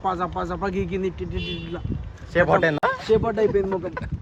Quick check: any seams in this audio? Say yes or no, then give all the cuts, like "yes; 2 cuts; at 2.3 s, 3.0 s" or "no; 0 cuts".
no; 0 cuts